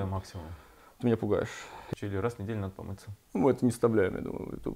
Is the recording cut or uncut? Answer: cut